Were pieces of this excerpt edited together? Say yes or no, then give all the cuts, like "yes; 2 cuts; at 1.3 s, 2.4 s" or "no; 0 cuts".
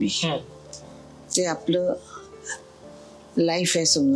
no; 0 cuts